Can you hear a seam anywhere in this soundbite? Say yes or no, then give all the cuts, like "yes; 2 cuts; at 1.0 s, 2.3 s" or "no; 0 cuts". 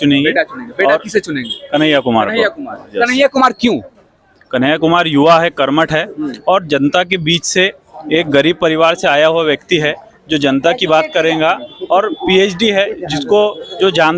no; 0 cuts